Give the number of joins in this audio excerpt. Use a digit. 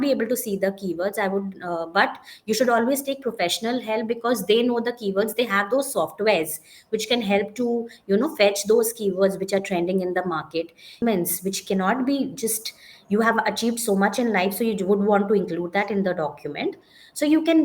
1